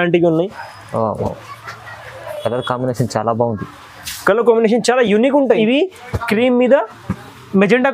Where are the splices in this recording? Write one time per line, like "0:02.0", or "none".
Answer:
0:05.6